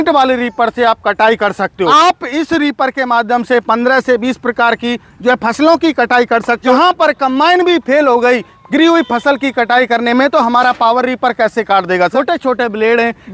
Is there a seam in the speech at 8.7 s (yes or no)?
no